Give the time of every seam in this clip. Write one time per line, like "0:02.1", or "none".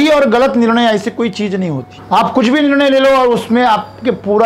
0:01.9